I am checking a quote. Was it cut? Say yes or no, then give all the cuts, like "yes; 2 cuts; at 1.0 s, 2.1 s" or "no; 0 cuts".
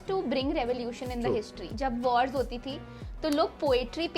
yes; 1 cut; at 1.7 s